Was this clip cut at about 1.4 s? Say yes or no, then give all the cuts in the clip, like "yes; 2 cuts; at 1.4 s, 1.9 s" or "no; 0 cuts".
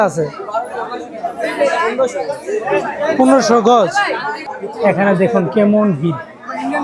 no; 1 cut; at 4.6 s